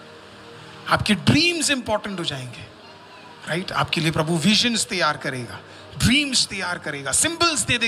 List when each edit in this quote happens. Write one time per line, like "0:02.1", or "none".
none